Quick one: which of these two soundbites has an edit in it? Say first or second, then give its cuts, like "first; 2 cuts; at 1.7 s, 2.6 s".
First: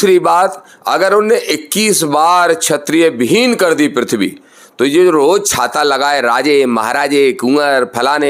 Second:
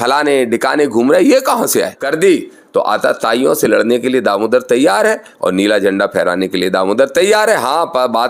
second; 1 cut; at 2.0 s